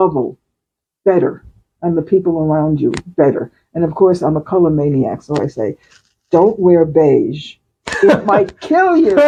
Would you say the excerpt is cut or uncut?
uncut